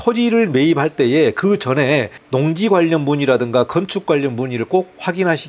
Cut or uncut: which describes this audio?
uncut